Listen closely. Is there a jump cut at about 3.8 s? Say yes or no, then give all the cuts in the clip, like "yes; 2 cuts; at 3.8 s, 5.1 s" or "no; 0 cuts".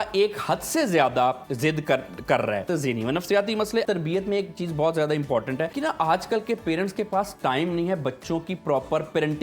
yes; 3 cuts; at 2.7 s, 3.8 s, 5.7 s